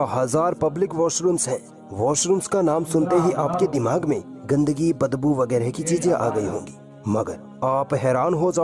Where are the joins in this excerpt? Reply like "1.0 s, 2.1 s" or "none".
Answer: none